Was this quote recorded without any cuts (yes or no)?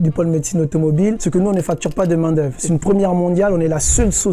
no